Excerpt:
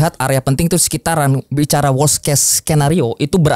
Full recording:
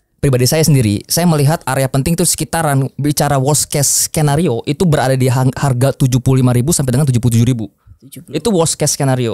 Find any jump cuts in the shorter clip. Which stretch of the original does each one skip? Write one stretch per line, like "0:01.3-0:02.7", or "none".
none